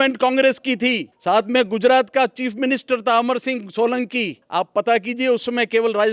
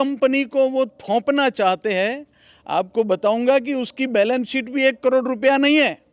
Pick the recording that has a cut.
first; 2 cuts; at 1.1 s, 4.4 s

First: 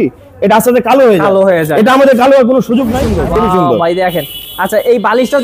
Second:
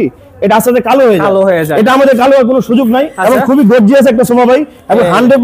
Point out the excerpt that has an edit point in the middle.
first; 1 cut; at 3.1 s

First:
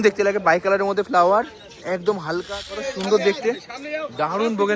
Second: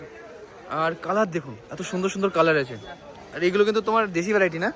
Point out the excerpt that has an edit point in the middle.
first; 1 cut; at 2.5 s

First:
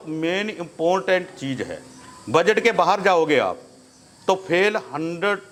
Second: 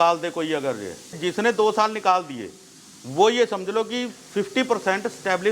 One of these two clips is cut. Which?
second; 1 cut; at 1.1 s

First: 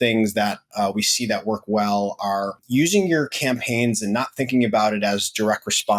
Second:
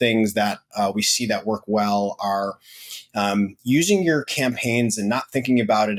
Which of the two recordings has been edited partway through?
first; 1 cut; at 2.6 s

